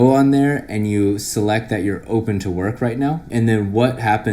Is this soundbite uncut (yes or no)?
no